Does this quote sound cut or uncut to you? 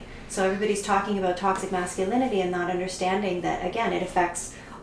uncut